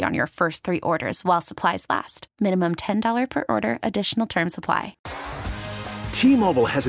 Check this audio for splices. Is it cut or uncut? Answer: cut